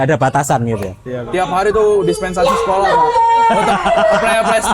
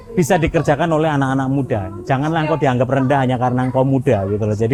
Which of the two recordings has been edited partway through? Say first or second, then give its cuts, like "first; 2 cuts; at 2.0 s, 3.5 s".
first; 1 cut; at 1.2 s